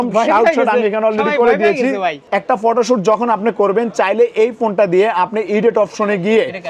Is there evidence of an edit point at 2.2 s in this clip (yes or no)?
yes